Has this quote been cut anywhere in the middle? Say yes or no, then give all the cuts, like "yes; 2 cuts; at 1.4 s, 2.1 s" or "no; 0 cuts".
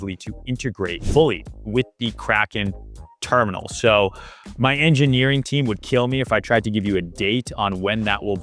yes; 1 cut; at 1.0 s